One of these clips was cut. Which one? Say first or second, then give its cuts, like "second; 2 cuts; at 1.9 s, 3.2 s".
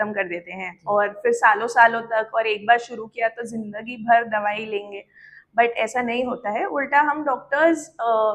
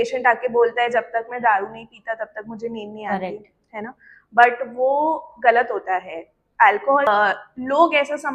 second; 2 cuts; at 1.9 s, 7.1 s